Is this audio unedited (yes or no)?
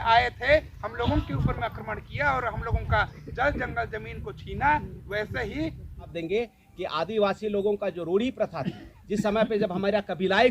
no